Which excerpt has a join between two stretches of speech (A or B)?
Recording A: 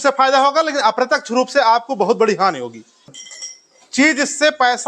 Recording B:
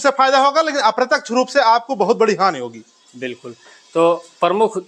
A